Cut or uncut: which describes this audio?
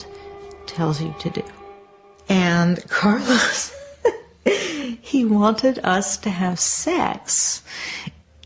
cut